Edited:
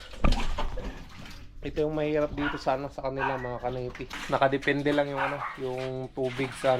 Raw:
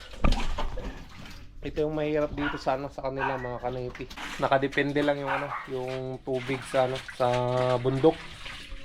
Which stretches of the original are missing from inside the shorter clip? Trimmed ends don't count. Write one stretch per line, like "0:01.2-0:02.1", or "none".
0:04.1-0:04.2

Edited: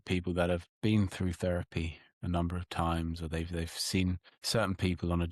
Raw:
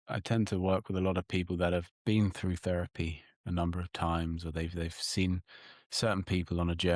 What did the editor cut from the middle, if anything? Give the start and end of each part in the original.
0:05.6-0:05.8

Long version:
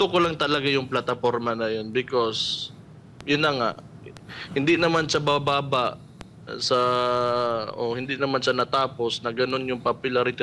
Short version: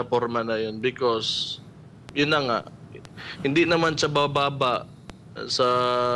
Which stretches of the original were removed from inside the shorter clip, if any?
none

